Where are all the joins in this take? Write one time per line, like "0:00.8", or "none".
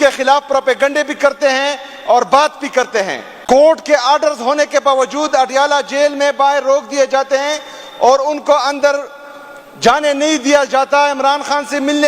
0:03.5